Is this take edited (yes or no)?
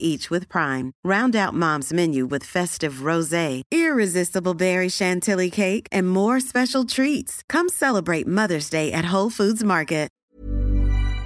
yes